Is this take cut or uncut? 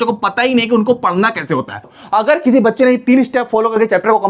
cut